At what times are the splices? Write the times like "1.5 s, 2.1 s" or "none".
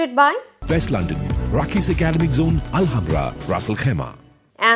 none